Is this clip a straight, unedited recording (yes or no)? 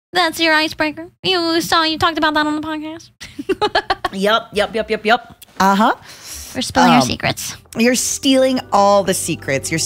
yes